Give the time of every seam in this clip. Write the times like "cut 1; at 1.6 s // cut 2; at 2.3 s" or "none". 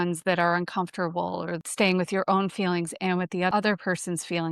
cut 1; at 1.6 s // cut 2; at 3.5 s